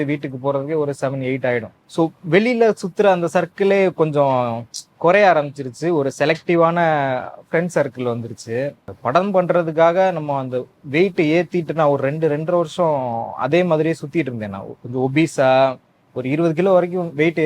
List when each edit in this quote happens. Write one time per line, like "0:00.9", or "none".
0:01.8
0:08.9